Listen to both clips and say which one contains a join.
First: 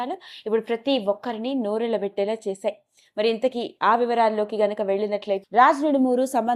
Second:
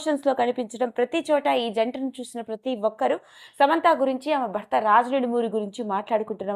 first; 1 cut; at 5.4 s

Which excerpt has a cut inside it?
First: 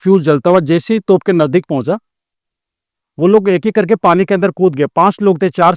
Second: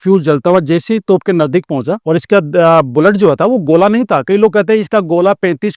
second; 1 cut; at 2.0 s

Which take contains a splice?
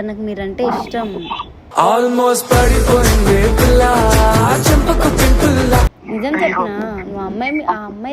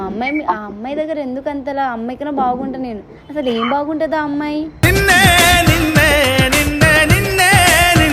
first; 1 cut; at 6.0 s

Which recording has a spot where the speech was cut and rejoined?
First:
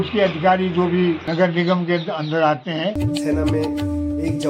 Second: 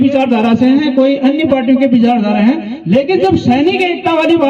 first; 1 cut; at 3.0 s

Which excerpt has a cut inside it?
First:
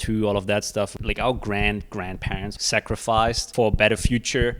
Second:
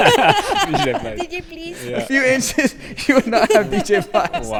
first; 3 cuts; at 1.0 s, 2.6 s, 3.4 s

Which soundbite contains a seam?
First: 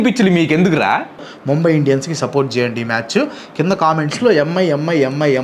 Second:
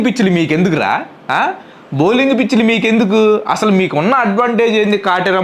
first; 1 cut; at 1.2 s

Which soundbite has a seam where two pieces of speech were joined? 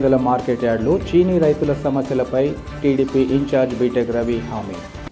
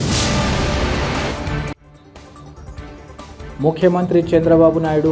second; 1 cut; at 1.2 s

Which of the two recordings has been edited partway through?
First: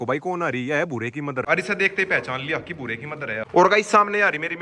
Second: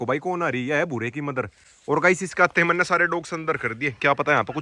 first; 2 cuts; at 1.5 s, 3.5 s

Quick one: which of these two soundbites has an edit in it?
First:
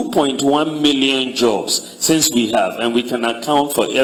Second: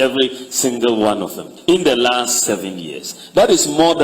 second; 1 cut; at 1.5 s

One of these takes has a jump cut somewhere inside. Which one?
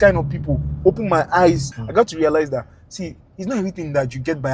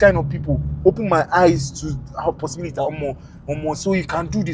first; 1 cut; at 1.8 s

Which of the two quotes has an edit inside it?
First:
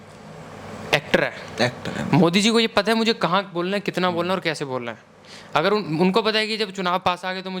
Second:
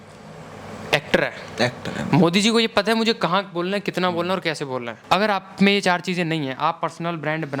second; 1 cut; at 4.9 s

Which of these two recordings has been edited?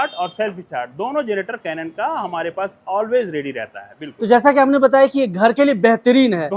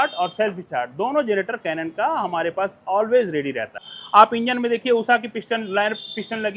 second; 1 cut; at 3.9 s

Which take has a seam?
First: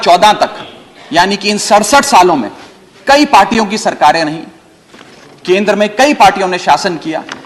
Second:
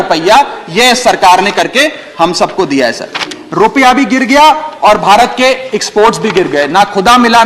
second; 1 cut; at 3.4 s

